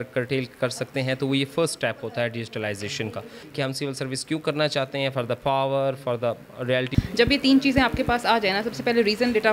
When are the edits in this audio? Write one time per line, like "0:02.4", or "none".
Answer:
0:03.3
0:06.9